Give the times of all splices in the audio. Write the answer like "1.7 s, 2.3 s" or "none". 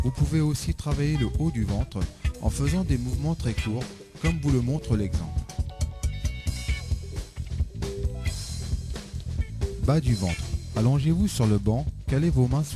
none